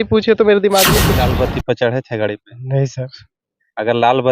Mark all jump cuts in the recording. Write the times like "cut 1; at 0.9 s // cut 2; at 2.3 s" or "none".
cut 1; at 1.2 s